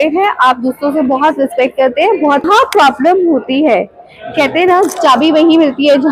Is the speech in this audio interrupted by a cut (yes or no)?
yes